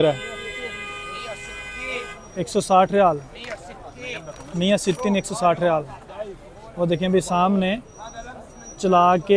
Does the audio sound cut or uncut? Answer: uncut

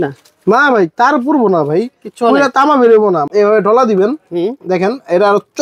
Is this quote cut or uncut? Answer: cut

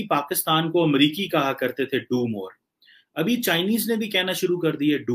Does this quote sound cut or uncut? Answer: uncut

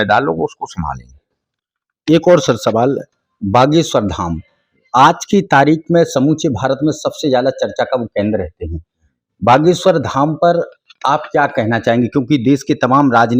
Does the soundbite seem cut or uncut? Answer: uncut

